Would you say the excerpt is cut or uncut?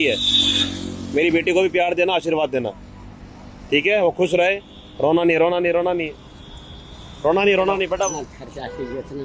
uncut